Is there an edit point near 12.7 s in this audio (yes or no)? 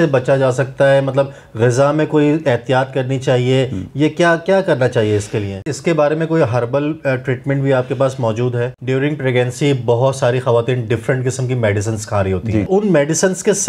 yes